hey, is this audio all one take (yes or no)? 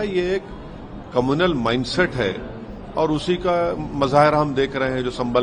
yes